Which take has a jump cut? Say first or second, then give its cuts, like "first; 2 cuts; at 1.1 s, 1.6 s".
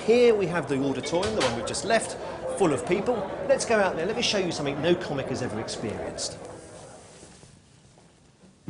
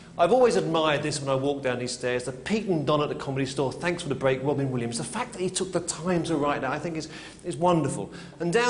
second; 1 cut; at 4.7 s